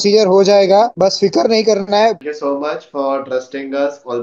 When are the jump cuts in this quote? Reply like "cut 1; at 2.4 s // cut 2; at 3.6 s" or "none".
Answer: cut 1; at 0.9 s // cut 2; at 2.3 s